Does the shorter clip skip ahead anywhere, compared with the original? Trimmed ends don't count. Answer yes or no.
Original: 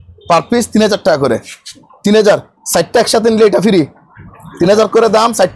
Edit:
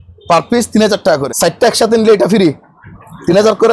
yes